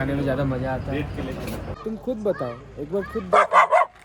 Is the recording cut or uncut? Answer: cut